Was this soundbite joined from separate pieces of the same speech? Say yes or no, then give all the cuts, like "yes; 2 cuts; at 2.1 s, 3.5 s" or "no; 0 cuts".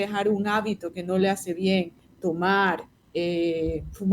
yes; 2 cuts; at 2.0 s, 2.9 s